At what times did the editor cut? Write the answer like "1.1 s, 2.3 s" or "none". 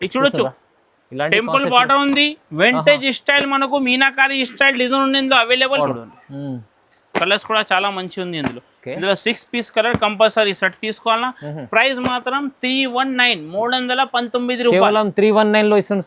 5.8 s